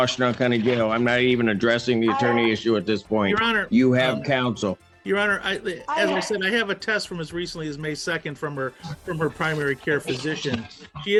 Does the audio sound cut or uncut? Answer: uncut